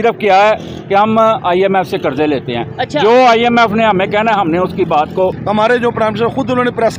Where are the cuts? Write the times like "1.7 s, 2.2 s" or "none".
5.3 s